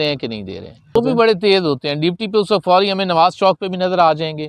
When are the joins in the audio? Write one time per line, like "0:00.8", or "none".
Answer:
0:00.9